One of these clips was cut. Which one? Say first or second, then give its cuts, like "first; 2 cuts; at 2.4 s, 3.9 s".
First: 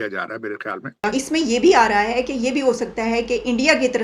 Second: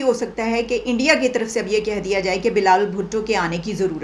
first; 1 cut; at 1.0 s